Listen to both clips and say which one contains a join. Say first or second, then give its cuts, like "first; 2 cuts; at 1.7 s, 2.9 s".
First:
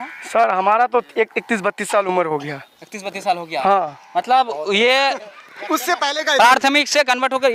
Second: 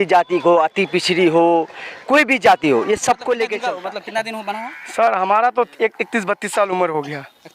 second; 1 cut; at 3.6 s